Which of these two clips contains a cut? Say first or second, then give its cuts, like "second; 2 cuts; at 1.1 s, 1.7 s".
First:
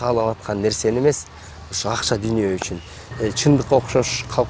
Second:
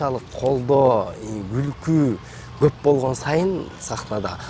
first; 1 cut; at 3.1 s